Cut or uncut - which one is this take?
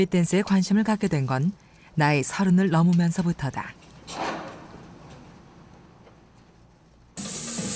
uncut